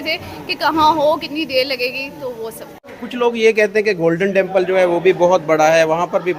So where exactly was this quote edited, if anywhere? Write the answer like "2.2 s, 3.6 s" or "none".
2.9 s